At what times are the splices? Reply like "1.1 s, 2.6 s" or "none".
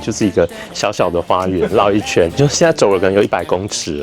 2.3 s